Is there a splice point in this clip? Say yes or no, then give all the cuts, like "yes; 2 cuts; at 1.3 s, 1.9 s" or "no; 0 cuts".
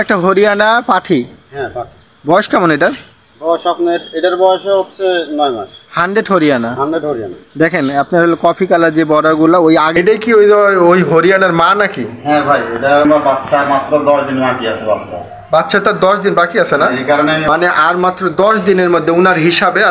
yes; 3 cuts; at 9.9 s, 13.0 s, 17.4 s